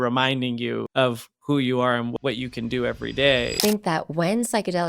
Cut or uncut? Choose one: cut